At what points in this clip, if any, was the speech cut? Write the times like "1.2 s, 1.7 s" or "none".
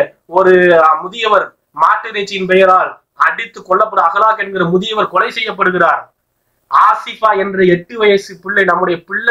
none